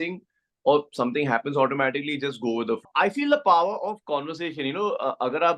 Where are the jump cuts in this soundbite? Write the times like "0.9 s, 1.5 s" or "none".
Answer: 2.9 s

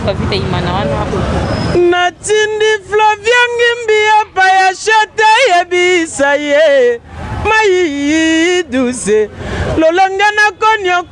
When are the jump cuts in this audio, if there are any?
1.1 s

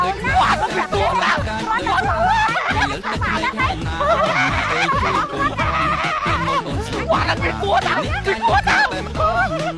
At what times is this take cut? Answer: none

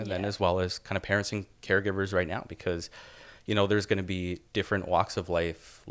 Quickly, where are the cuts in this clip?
none

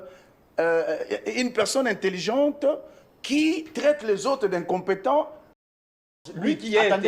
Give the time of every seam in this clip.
6.1 s

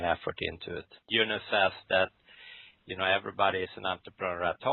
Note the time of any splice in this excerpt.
1.0 s

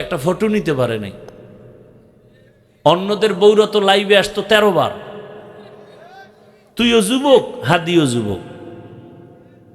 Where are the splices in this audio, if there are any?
6.6 s

